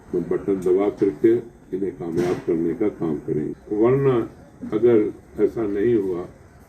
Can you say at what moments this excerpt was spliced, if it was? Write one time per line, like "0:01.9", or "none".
0:03.5

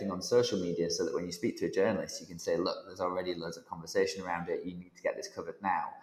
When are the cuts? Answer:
none

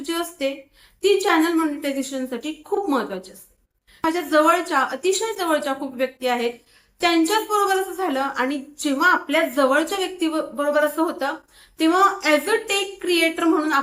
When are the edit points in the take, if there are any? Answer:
0:04.0

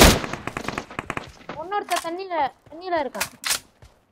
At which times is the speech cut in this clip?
none

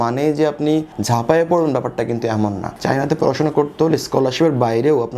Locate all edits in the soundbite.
0:02.8

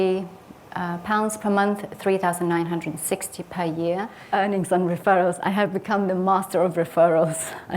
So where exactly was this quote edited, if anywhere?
0:04.2

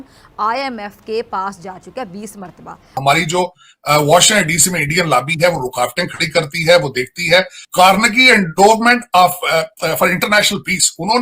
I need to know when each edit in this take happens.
0:03.0
0:07.6

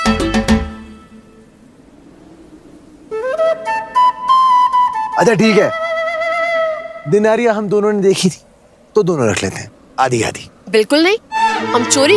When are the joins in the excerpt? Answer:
none

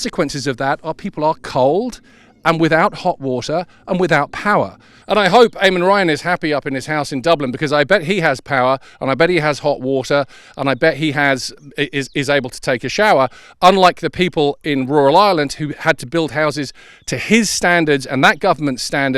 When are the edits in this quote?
0:04.9

